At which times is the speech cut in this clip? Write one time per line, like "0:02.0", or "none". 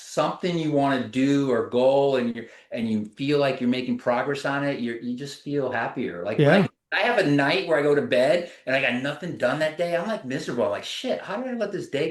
0:06.8